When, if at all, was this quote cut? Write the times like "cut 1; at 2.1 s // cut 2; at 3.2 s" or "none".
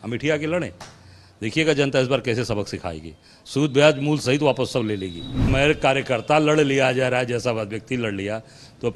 cut 1; at 5.5 s